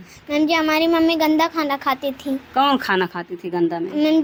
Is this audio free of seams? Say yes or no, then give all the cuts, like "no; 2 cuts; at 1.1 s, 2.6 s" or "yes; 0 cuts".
yes; 0 cuts